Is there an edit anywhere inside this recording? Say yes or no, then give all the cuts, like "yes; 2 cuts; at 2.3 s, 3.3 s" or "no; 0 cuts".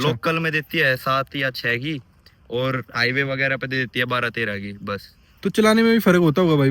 no; 0 cuts